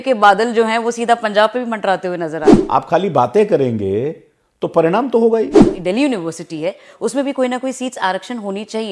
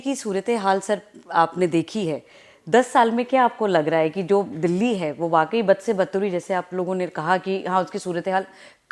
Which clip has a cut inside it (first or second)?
first